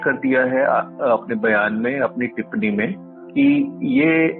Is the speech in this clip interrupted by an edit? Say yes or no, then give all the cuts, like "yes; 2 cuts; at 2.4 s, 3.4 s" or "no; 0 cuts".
no; 0 cuts